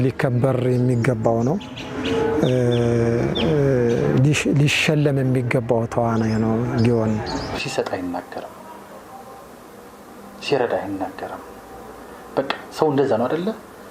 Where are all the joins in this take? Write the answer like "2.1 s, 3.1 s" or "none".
none